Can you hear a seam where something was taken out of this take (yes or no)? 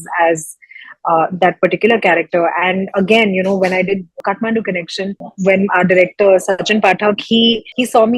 no